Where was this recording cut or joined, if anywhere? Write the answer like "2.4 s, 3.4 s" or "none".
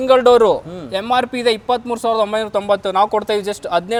none